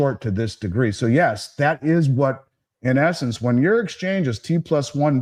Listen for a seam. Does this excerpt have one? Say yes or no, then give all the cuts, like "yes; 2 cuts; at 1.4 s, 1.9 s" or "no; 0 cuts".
no; 0 cuts